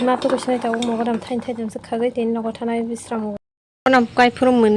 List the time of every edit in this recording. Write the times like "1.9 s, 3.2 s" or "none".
3.4 s